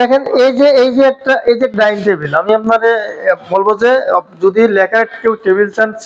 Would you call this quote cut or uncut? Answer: uncut